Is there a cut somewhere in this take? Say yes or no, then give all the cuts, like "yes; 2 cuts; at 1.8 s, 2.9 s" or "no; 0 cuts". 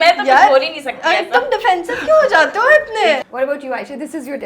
yes; 1 cut; at 3.2 s